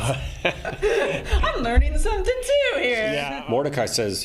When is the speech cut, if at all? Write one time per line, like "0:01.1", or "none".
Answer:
0:03.3